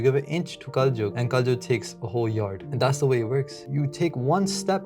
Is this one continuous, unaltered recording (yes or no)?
no